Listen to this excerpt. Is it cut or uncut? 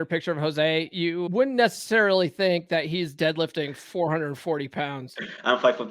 cut